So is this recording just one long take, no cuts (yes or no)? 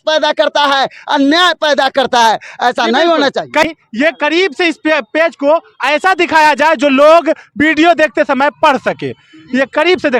no